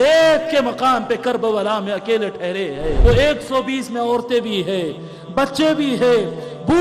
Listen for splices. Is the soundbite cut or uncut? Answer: cut